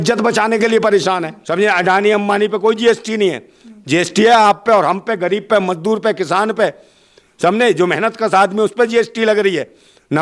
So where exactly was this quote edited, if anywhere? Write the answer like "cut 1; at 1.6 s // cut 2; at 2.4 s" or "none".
cut 1; at 1.4 s